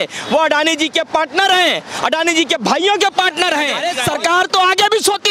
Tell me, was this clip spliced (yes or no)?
yes